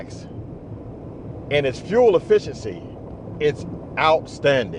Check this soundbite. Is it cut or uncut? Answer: uncut